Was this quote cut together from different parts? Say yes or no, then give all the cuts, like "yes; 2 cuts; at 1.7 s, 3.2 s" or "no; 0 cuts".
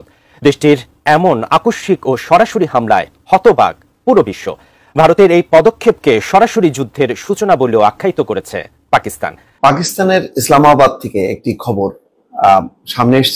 yes; 1 cut; at 9.5 s